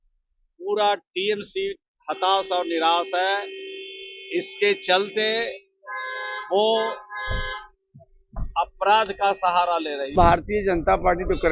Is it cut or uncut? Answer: cut